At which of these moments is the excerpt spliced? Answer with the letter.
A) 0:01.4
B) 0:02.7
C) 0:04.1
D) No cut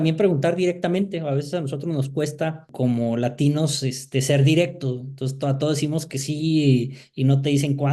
B